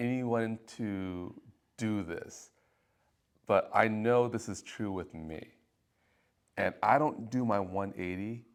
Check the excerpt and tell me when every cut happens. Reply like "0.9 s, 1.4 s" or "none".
none

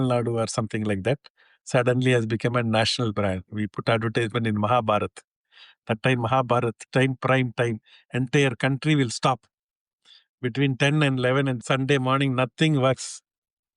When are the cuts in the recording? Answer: 11.6 s

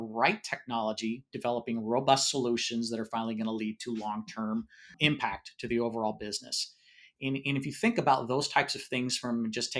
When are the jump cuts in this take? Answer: 5.0 s

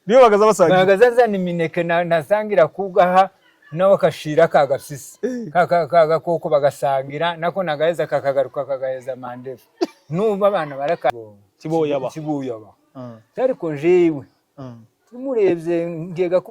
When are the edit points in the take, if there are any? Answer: 11.1 s

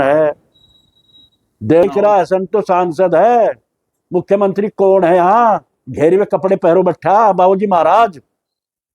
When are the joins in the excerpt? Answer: 1.8 s

